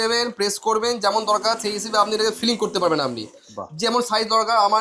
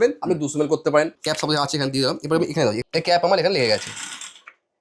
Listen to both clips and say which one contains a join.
second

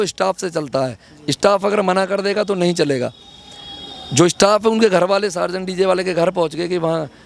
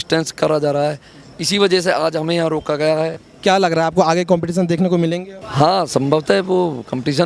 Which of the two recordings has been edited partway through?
second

